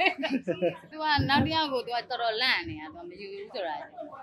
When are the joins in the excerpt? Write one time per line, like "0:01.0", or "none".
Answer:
0:00.9